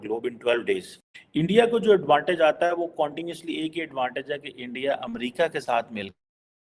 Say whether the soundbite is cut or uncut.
cut